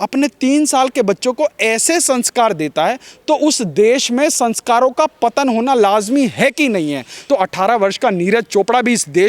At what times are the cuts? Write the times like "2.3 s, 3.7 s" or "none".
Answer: 7.1 s